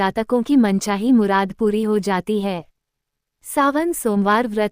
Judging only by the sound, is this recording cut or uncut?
cut